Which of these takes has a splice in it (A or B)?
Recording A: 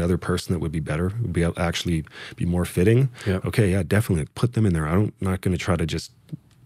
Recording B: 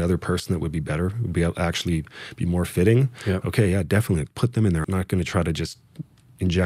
B